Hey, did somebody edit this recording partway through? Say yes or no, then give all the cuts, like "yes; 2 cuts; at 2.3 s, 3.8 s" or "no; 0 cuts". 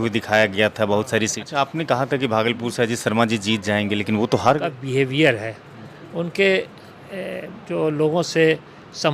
yes; 2 cuts; at 1.4 s, 4.8 s